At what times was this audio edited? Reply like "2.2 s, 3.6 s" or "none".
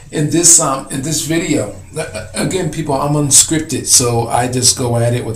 3.2 s